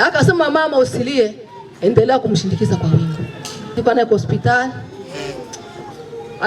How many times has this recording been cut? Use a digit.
1